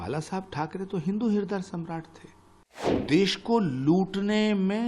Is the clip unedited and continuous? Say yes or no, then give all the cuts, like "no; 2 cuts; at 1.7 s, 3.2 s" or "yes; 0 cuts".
no; 1 cut; at 3.0 s